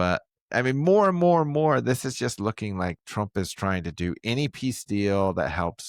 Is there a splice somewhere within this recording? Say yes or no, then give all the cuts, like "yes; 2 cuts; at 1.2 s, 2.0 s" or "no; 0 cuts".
no; 0 cuts